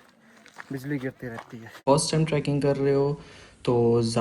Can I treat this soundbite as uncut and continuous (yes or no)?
no